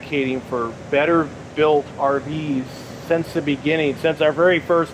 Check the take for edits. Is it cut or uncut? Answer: uncut